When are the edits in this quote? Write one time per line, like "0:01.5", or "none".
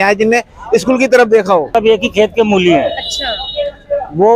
0:01.7